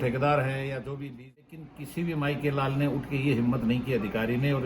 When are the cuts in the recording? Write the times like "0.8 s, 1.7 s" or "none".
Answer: 1.4 s